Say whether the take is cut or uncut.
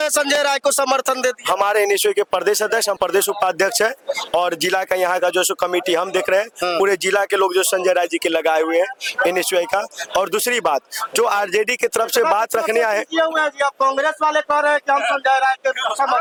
uncut